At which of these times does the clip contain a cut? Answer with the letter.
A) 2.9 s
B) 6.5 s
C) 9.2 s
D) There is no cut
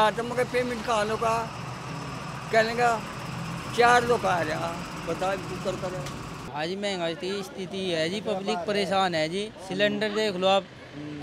B